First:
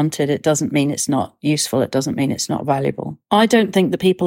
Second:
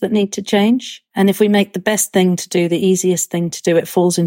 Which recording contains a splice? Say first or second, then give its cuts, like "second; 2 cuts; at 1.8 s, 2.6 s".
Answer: first; 1 cut; at 3.1 s